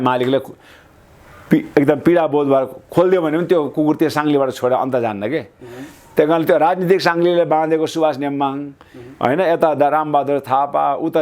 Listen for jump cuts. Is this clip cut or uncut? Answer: uncut